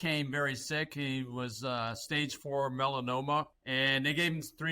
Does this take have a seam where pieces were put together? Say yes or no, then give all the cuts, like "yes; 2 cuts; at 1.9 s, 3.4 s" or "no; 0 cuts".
yes; 1 cut; at 3.6 s